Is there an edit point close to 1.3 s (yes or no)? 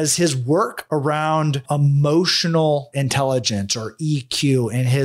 no